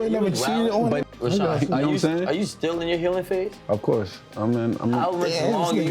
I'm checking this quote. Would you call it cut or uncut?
cut